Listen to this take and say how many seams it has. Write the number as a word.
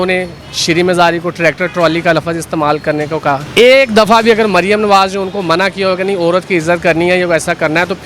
one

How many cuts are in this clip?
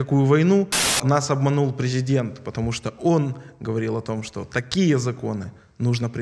one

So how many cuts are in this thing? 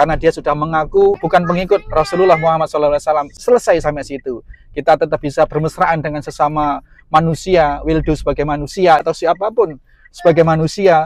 three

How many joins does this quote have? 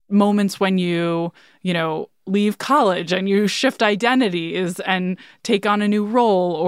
zero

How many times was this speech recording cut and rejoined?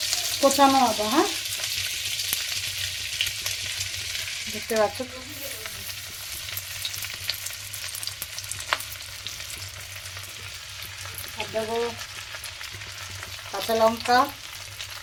zero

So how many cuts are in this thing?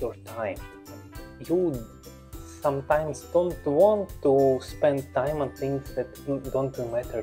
zero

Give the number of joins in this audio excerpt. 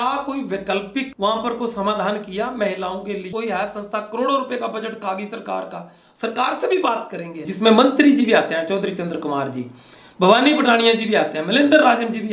two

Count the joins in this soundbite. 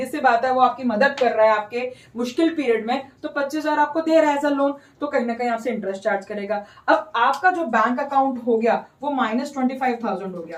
zero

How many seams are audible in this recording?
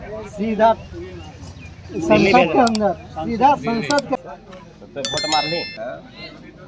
one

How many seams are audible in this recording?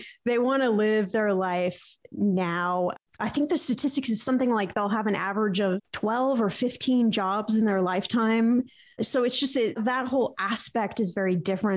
one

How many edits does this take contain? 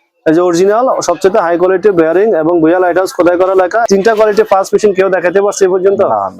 one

